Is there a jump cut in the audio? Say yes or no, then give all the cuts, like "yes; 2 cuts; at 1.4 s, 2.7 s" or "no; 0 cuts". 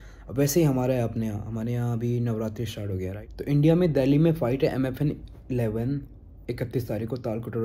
yes; 1 cut; at 3.3 s